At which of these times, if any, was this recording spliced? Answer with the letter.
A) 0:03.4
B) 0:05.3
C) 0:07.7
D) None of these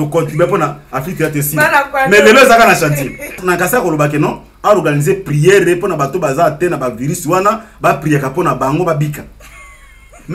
A